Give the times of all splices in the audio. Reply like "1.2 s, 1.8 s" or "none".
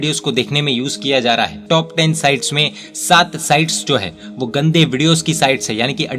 1.6 s